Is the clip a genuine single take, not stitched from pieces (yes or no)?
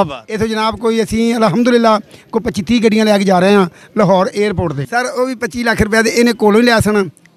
no